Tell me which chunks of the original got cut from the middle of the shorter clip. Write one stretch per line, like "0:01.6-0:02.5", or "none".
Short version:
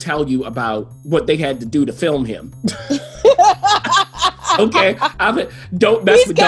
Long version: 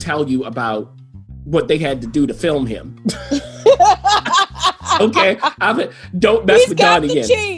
0:00.9-0:01.3